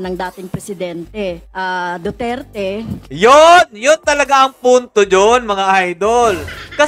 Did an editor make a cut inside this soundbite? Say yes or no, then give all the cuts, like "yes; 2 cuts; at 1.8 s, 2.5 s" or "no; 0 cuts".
no; 0 cuts